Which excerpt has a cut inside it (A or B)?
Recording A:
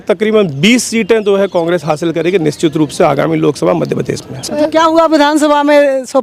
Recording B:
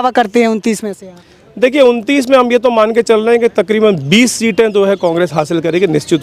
A